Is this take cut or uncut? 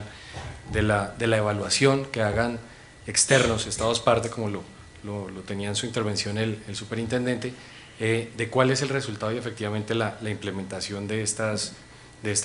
cut